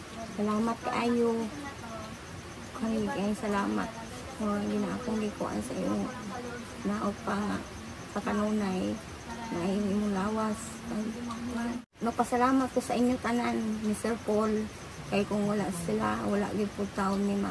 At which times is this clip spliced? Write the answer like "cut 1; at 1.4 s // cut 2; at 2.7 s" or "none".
cut 1; at 11.9 s